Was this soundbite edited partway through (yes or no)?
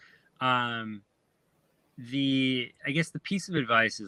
no